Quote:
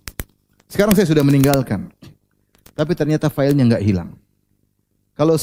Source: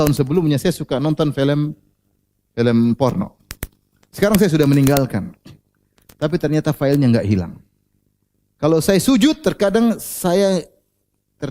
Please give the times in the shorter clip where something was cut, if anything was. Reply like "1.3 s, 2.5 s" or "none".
none